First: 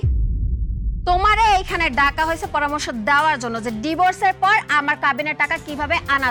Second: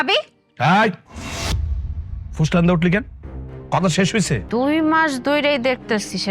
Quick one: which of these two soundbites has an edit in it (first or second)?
second